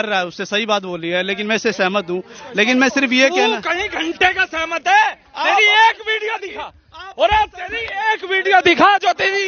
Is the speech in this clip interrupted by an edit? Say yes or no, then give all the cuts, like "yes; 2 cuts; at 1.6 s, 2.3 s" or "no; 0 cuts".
no; 0 cuts